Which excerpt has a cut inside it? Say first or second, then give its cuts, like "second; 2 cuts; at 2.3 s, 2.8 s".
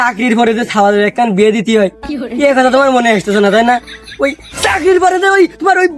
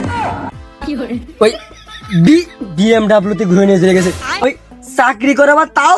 second; 1 cut; at 4.2 s